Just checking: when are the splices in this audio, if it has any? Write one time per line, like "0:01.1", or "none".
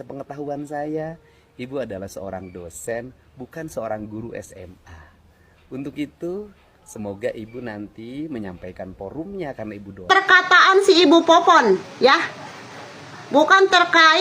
0:10.0